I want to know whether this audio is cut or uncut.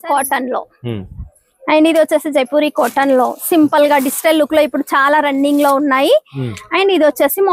uncut